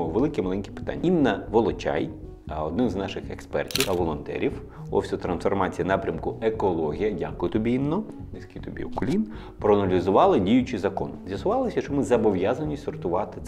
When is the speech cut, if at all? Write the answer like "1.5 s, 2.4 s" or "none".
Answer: none